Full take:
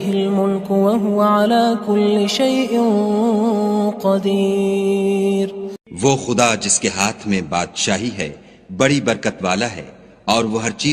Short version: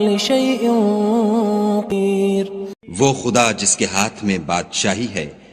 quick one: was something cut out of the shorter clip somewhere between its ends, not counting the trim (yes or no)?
yes